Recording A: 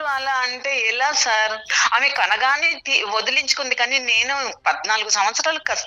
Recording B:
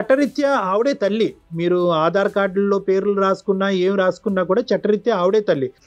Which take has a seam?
A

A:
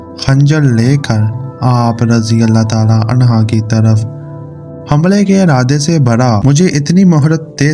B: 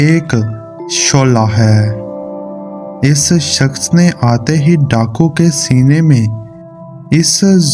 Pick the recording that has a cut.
A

